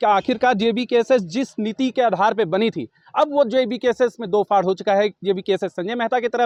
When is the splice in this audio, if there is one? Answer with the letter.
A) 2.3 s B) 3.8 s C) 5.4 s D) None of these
D